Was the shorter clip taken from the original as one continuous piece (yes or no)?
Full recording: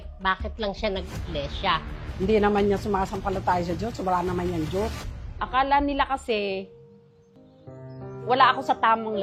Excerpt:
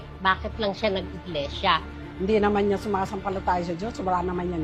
yes